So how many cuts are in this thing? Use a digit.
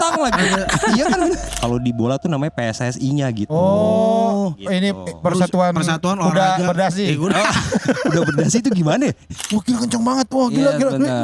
2